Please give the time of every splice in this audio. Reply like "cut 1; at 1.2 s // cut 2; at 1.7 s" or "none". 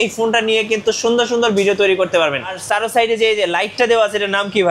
cut 1; at 2.6 s